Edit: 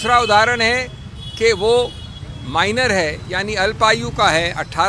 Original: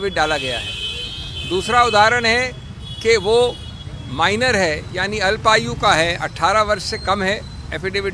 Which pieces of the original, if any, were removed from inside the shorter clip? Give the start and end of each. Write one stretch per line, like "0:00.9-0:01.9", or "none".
none